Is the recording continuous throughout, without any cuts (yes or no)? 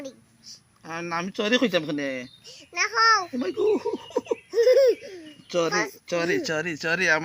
yes